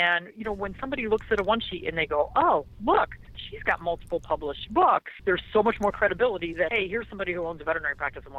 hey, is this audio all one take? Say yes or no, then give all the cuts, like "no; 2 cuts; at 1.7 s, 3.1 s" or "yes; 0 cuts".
no; 2 cuts; at 5.1 s, 6.7 s